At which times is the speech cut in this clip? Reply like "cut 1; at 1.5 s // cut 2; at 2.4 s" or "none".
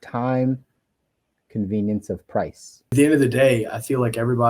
cut 1; at 2.9 s